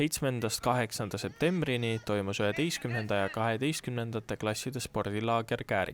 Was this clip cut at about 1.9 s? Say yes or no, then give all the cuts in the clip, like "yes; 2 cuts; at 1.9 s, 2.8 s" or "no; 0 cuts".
no; 0 cuts